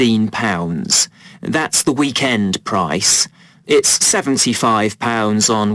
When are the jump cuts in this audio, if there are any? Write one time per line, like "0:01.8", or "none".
0:01.0